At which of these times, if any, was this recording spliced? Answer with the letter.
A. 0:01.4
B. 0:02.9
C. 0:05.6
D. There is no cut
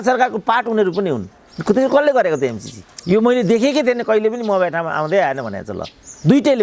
B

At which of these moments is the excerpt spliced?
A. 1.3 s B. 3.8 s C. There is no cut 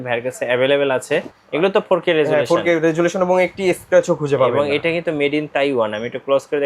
A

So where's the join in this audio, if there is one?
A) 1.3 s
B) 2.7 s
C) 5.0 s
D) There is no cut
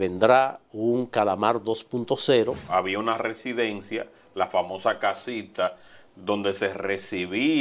B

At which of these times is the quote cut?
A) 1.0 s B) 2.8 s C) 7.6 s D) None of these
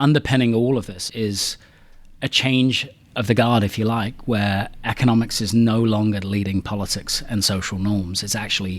A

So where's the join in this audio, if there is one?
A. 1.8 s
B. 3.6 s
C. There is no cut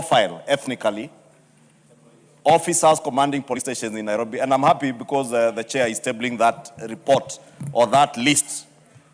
B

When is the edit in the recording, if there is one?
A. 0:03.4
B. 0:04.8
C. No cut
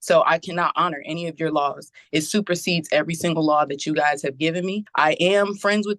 B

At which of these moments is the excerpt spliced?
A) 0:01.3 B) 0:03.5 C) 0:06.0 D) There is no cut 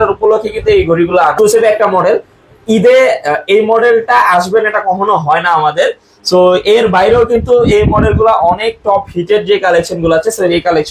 A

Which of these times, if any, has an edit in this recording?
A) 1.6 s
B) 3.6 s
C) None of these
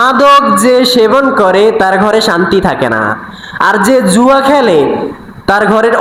C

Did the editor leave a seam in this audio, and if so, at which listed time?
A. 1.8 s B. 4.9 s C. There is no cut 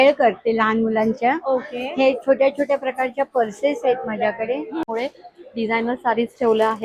B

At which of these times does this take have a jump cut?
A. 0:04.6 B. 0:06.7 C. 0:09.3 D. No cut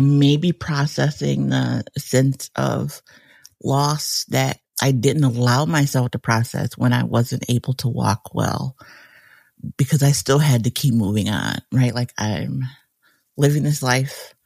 D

